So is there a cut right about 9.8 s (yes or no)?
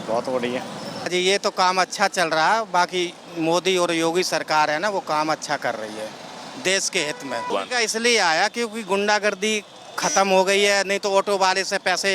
no